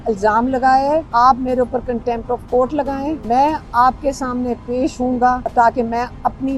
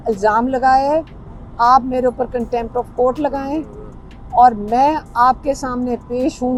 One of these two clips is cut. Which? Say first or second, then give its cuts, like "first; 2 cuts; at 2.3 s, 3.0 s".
first; 3 cuts; at 1.1 s, 3.2 s, 5.4 s